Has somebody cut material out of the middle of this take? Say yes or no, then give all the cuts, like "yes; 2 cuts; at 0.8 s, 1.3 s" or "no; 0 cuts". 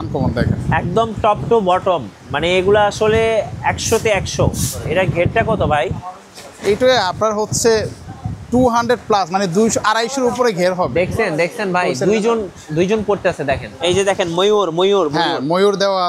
yes; 2 cuts; at 4.8 s, 13.7 s